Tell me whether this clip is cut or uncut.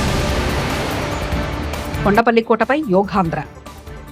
cut